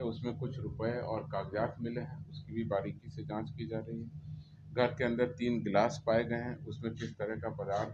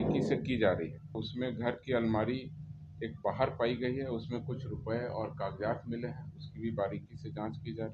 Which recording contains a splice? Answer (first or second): second